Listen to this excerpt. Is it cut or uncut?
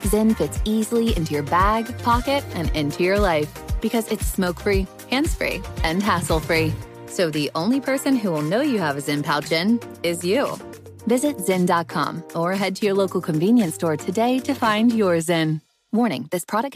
uncut